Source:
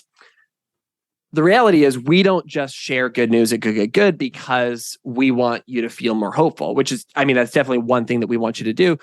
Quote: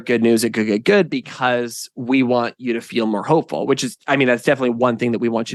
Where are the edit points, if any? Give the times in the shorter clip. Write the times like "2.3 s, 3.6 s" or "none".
none

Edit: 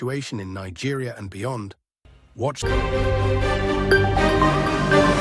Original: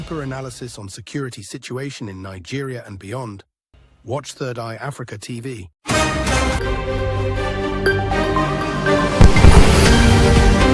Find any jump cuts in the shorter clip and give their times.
2.6 s

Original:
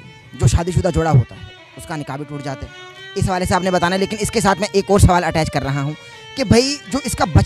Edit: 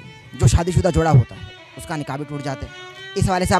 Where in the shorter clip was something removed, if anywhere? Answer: none

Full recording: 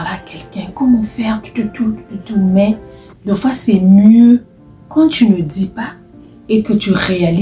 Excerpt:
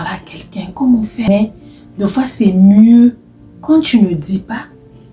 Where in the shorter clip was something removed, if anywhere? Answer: 1.3 s

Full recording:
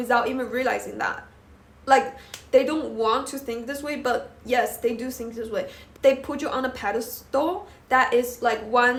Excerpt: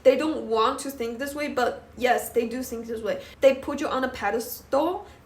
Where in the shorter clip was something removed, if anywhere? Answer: 3.3 s

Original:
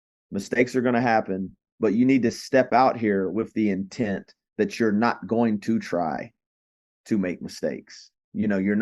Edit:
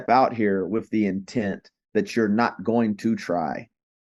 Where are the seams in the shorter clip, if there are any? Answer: none

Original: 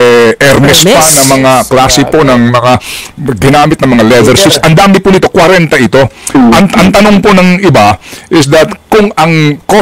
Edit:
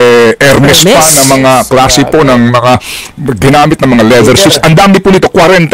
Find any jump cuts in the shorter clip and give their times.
none

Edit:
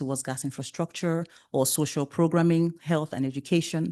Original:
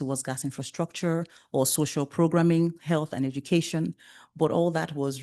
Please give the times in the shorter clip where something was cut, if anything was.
none

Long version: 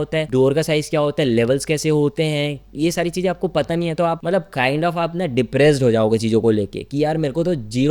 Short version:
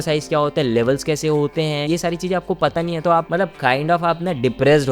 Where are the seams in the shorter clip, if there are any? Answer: 1.8 s

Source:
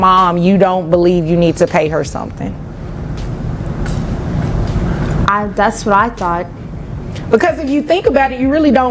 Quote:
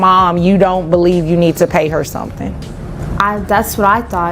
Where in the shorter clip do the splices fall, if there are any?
3.0 s

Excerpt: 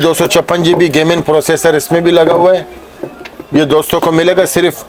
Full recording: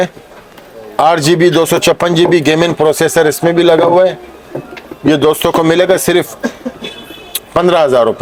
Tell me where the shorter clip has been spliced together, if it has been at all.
none

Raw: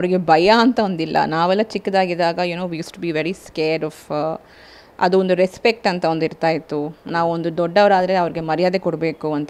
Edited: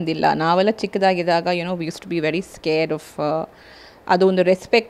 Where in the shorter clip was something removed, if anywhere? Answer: none

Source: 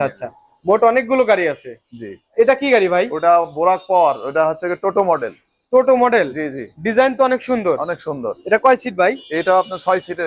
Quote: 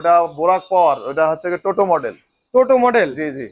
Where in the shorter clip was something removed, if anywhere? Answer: none

